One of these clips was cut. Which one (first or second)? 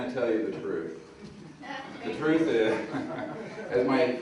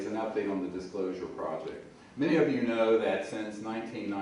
first